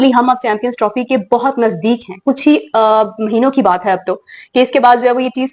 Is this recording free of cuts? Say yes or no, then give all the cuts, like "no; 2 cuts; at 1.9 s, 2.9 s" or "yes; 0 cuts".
yes; 0 cuts